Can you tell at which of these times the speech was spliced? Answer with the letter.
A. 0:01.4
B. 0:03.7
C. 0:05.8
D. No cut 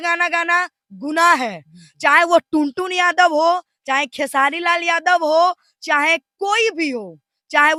D